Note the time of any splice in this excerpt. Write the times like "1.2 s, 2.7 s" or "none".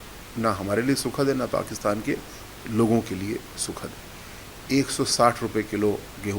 none